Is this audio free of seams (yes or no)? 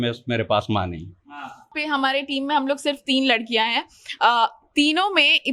no